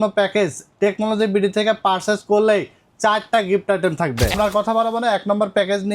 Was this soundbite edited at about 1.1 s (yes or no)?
no